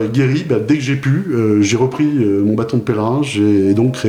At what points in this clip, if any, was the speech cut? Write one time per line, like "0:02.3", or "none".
none